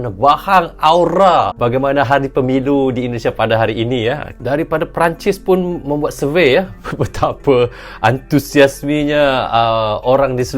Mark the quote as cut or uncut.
cut